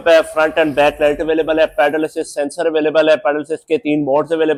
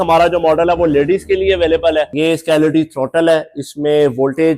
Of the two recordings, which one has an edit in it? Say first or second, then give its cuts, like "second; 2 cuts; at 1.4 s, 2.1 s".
second; 1 cut; at 2.1 s